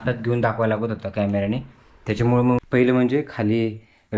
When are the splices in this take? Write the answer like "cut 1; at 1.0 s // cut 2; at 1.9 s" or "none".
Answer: cut 1; at 2.6 s